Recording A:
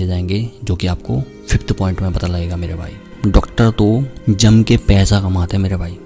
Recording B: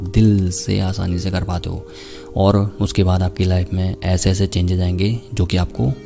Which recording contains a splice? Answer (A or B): A